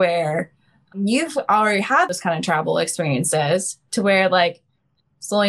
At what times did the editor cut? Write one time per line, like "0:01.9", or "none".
0:00.9